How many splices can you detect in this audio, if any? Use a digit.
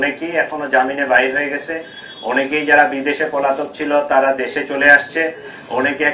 0